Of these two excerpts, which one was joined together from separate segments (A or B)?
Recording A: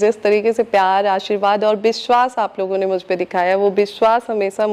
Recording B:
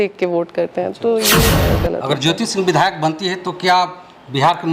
B